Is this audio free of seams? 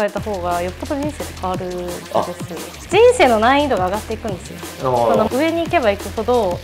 no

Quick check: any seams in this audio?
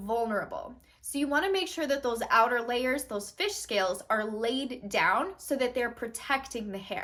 no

